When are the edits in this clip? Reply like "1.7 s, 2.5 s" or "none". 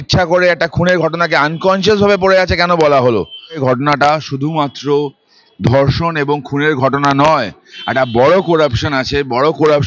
3.6 s